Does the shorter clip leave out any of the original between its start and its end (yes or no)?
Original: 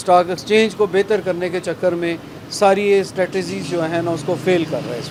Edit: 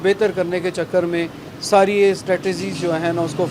no